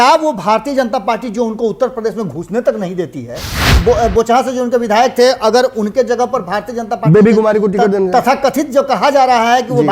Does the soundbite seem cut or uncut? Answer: cut